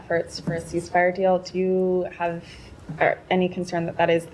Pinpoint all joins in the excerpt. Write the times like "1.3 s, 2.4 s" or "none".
none